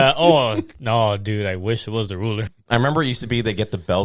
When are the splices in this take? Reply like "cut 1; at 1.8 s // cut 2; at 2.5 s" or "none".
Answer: cut 1; at 2.5 s